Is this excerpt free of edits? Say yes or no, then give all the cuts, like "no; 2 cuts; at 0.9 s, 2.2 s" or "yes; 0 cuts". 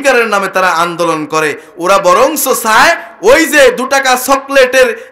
yes; 0 cuts